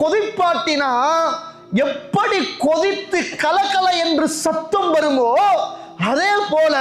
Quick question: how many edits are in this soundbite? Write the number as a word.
zero